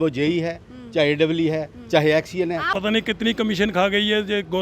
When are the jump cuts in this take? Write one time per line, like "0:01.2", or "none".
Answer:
0:02.7